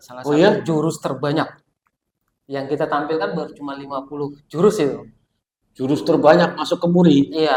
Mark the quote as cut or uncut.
uncut